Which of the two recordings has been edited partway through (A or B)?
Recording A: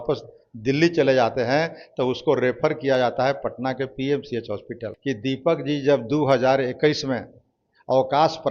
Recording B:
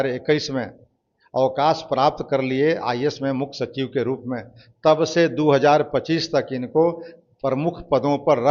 A